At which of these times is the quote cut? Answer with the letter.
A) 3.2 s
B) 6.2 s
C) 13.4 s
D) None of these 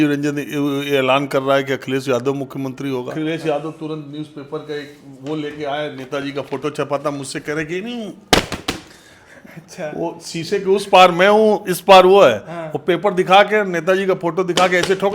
A